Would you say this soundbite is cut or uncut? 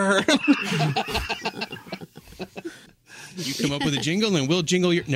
cut